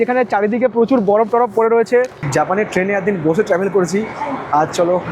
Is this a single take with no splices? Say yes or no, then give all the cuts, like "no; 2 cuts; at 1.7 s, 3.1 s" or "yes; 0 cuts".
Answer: no; 1 cut; at 2.2 s